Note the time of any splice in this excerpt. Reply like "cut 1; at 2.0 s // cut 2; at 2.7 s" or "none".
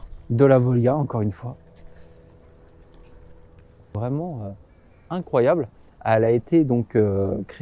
cut 1; at 4.0 s